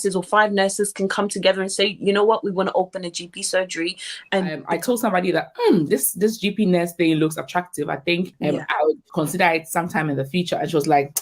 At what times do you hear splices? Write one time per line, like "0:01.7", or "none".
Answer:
0:04.6